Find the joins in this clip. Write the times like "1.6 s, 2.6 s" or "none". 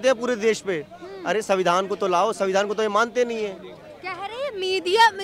none

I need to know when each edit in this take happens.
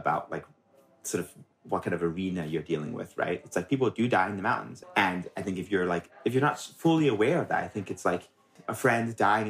4.8 s, 8.5 s

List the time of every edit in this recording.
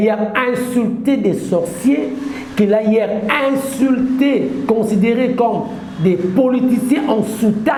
none

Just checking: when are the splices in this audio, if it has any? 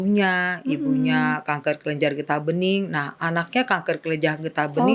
none

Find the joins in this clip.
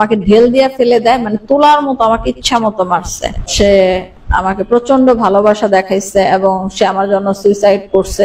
3.4 s

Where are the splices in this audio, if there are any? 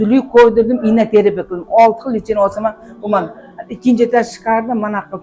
none

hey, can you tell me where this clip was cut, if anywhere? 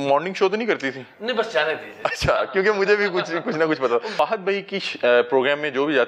4.2 s

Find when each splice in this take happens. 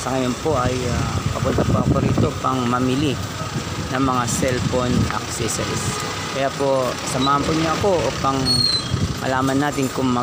none

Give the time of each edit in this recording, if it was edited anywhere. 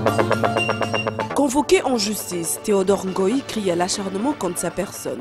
1.1 s

